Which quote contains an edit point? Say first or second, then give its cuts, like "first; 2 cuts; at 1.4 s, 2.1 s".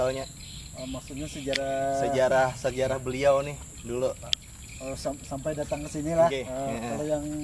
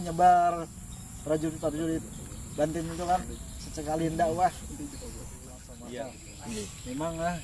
second; 1 cut; at 5.7 s